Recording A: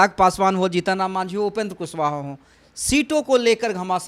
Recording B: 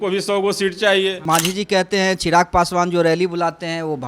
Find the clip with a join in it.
B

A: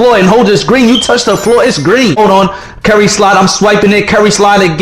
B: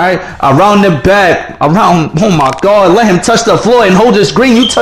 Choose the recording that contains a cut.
A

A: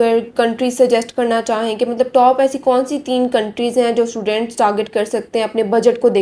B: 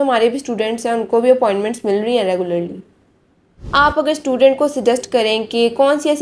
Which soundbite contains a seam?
B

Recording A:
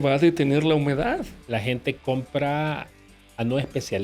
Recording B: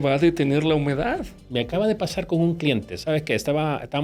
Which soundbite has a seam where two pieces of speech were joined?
A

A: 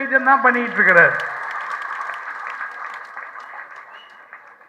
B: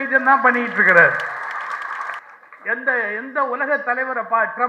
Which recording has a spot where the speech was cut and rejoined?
B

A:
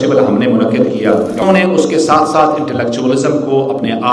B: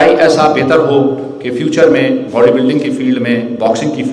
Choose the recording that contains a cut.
A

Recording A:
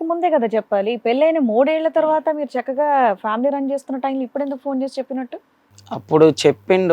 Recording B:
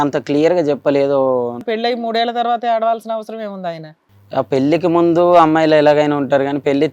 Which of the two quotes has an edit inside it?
B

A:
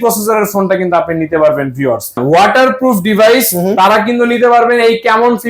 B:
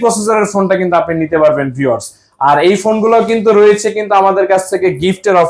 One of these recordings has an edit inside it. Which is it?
A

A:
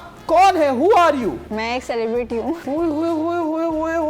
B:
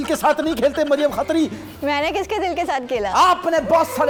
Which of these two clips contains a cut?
A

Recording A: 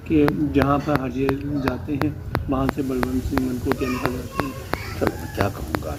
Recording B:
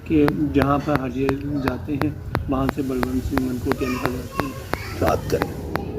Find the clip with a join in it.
B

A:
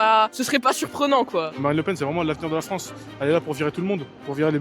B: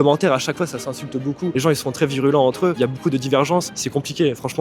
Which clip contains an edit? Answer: A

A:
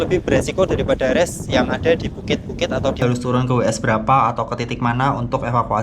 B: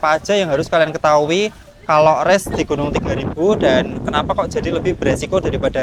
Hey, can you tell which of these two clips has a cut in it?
A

